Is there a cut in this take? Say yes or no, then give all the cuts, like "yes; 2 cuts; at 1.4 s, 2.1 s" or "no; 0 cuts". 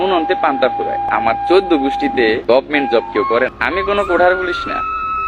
yes; 3 cuts; at 1.1 s, 2.4 s, 3.6 s